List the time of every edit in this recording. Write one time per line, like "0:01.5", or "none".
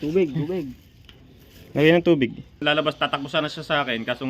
0:02.6